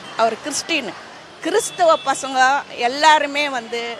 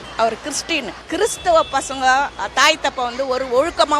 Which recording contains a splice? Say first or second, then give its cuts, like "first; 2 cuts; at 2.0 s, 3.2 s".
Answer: second; 2 cuts; at 1.0 s, 2.4 s